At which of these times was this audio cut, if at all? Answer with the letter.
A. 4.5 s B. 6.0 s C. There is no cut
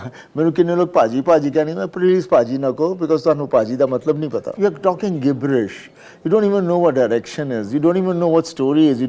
A